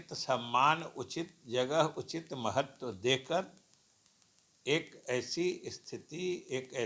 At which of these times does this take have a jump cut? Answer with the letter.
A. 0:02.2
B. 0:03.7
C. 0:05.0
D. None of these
D